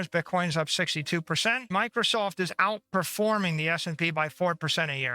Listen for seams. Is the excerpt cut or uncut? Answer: cut